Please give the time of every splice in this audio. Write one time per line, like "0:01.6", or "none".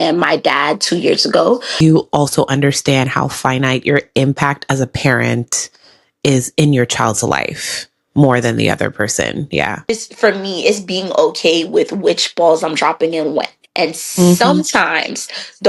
0:01.8
0:09.9